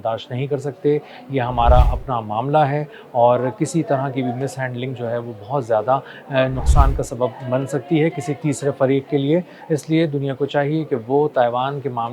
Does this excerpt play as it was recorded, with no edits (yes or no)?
yes